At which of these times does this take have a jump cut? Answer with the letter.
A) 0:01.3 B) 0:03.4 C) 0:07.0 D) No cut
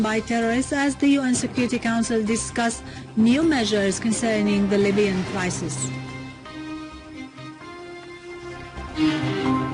B